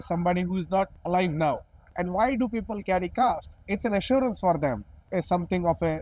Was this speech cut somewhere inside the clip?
yes; 4 cuts; at 1.0 s, 1.9 s, 3.5 s, 4.9 s

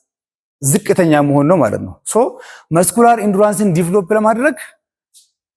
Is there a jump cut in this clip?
no; 0 cuts

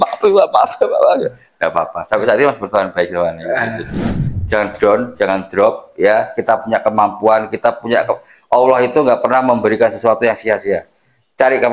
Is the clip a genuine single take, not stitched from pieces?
no; 1 cut; at 4.2 s

